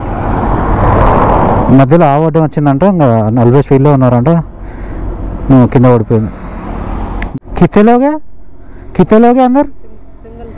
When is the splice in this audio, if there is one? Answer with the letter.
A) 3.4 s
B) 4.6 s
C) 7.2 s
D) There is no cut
C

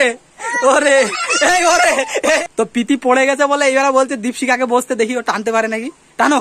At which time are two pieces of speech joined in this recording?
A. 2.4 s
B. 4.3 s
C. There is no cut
A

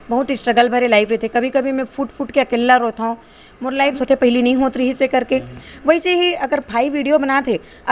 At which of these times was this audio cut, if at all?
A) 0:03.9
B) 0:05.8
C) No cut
A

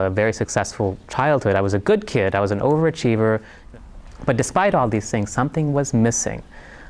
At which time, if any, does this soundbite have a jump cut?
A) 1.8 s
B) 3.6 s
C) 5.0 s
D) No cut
B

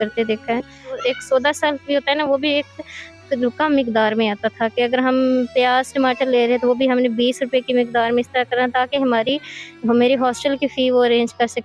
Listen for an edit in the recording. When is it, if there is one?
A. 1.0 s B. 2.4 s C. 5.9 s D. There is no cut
A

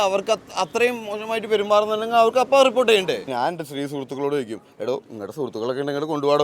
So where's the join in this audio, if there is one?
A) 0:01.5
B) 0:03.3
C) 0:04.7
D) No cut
B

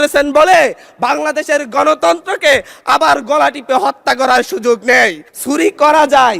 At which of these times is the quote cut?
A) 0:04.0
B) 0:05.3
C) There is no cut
B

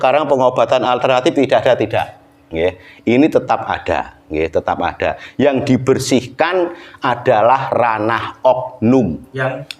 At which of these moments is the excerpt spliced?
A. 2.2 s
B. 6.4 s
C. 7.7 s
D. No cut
D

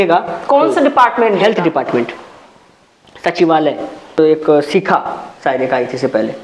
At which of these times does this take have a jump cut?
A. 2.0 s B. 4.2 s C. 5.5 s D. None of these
B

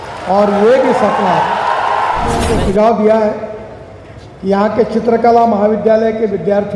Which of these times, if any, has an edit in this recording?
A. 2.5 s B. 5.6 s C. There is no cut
A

